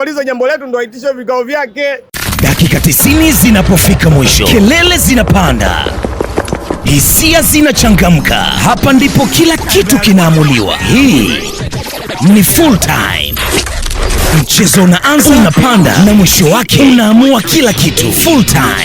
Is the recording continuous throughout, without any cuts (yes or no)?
no